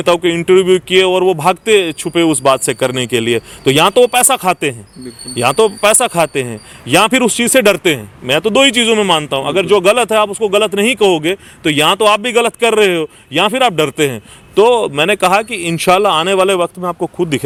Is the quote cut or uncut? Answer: uncut